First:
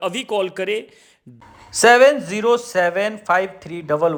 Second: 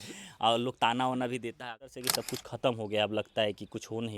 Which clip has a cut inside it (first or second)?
second